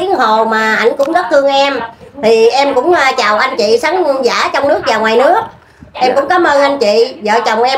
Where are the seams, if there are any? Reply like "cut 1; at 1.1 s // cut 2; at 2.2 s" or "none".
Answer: none